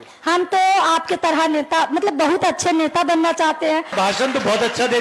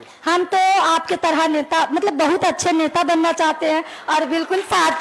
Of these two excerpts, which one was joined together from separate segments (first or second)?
first